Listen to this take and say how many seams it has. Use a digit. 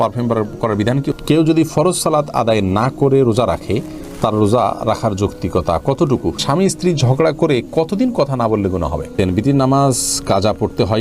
3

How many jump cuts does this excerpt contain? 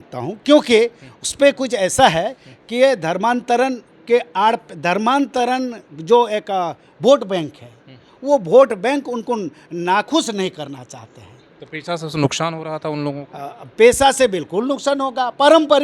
0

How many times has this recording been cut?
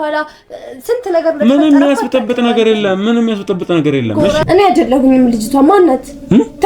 1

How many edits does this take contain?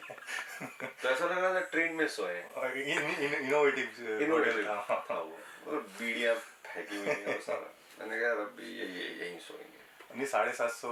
0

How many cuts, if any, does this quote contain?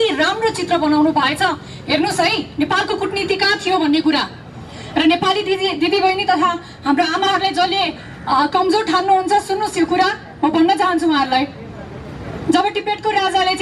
0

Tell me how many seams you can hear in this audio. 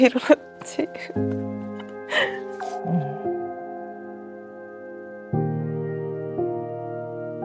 0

